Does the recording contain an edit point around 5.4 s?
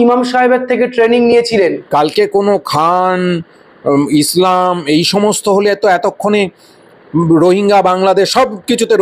no; 1 cut; at 1.8 s

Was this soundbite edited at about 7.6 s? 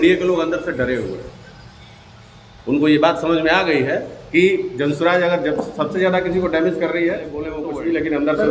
yes; 1 cut; at 7.6 s

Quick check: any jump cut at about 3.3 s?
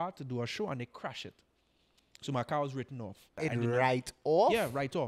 yes; 1 cut; at 3.3 s

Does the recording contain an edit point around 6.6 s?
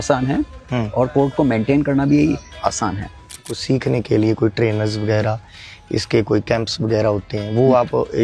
no; 1 cut; at 3.5 s

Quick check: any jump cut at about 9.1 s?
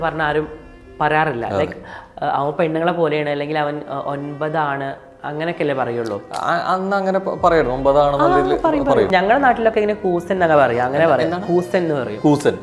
yes; 1 cut; at 9.1 s

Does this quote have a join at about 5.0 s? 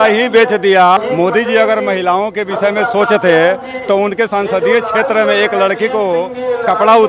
no; 1 cut; at 1.0 s

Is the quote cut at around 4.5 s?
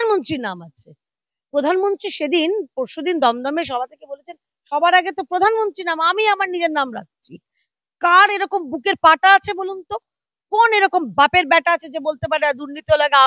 no; 0 cuts

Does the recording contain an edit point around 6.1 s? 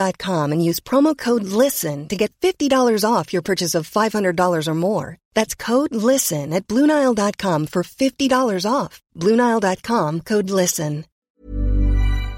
no; 1 cut; at 11.2 s

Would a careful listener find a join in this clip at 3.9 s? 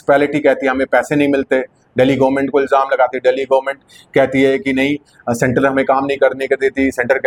no; 0 cuts

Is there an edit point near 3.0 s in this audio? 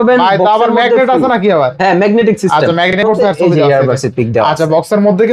yes; 1 cut; at 3.0 s

